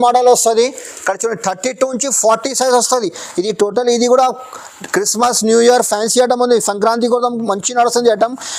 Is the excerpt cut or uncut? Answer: uncut